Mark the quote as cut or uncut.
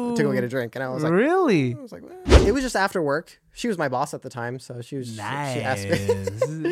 cut